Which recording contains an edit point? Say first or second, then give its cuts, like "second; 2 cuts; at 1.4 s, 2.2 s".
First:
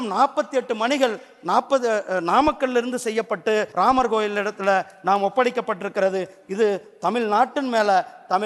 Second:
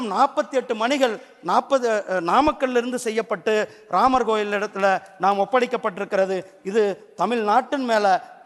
first; 1 cut; at 3.7 s